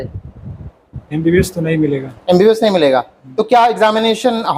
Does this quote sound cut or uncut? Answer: uncut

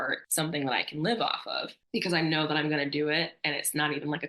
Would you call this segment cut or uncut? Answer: uncut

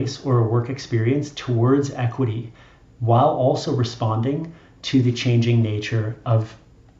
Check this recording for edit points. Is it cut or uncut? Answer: uncut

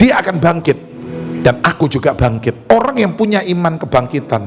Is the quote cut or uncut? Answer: cut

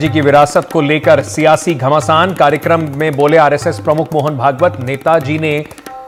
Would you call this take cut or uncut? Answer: uncut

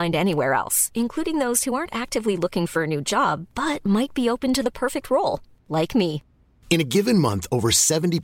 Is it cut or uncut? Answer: uncut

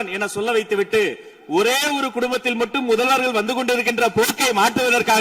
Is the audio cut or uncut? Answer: uncut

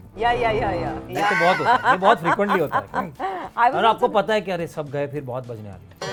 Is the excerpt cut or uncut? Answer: uncut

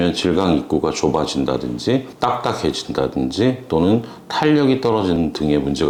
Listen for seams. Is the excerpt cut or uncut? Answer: uncut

